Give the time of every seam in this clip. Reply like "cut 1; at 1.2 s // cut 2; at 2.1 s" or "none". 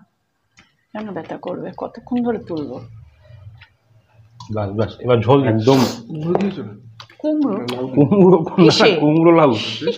cut 1; at 5.5 s

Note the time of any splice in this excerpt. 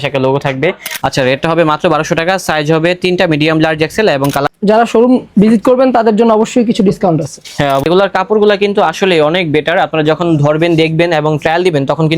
cut 1; at 0.9 s // cut 2; at 4.5 s // cut 3; at 7.8 s

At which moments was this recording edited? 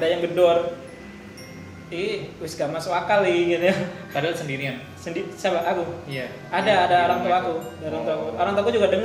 none

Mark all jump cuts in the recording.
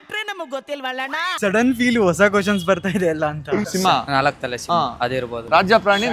cut 1; at 1.3 s // cut 2; at 3.7 s

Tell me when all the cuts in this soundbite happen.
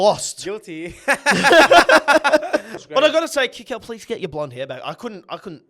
cut 1; at 2.7 s

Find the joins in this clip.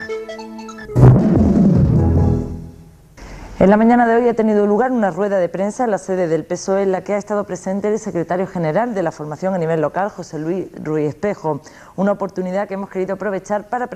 none

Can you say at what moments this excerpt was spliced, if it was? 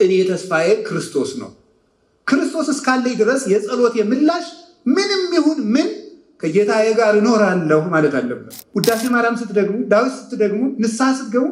cut 1; at 8.6 s

